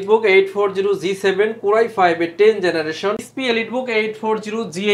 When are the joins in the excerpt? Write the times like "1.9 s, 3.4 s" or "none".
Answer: 3.2 s